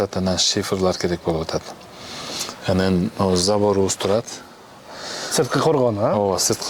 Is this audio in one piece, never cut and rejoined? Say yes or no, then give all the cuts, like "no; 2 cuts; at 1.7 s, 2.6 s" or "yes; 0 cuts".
yes; 0 cuts